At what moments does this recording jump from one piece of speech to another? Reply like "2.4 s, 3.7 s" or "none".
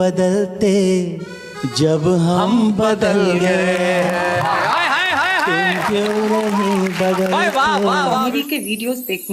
8.2 s